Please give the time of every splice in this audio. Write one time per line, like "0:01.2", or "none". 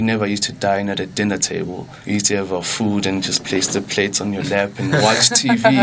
0:01.9